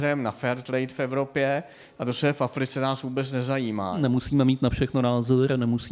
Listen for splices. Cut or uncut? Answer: uncut